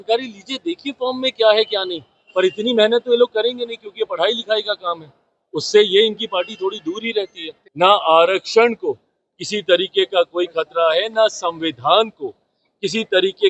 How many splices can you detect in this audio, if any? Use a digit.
1